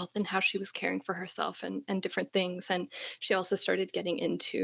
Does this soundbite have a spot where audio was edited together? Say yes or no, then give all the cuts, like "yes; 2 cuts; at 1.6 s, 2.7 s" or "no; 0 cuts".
no; 0 cuts